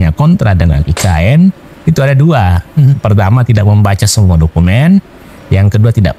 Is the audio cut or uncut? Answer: uncut